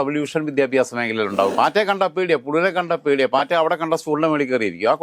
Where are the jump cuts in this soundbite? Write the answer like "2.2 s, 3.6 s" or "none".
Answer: 1.5 s